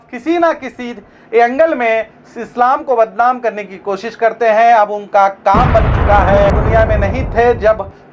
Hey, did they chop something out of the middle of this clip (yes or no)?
yes